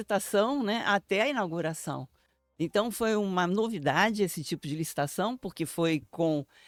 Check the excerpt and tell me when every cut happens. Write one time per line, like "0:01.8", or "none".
none